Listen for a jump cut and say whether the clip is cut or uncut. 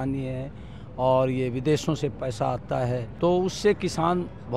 cut